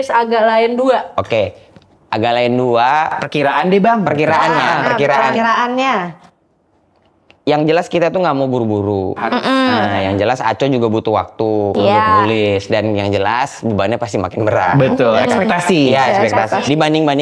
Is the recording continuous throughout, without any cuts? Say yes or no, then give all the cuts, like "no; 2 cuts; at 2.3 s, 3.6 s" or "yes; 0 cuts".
yes; 0 cuts